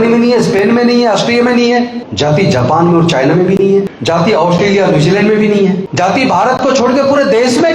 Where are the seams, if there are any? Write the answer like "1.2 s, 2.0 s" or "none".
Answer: 2.0 s, 3.9 s, 5.9 s